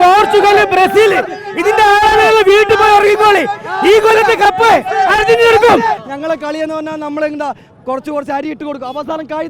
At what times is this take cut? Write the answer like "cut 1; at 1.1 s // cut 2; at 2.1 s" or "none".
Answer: cut 1; at 6.0 s